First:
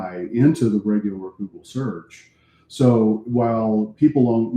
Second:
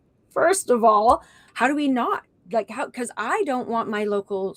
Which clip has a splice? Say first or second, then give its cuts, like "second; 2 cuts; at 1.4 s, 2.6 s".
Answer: second; 1 cut; at 1.5 s